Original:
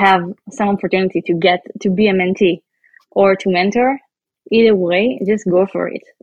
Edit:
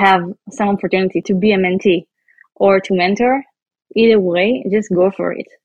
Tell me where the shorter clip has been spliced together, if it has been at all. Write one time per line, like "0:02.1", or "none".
0:01.2